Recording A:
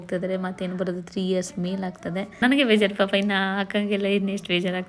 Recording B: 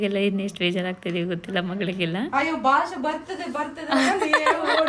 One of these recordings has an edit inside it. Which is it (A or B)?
A